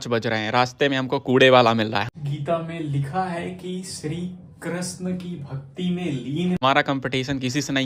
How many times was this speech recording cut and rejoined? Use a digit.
2